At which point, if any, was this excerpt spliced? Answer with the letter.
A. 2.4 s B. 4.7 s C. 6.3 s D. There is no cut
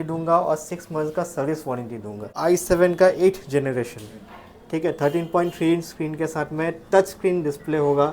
A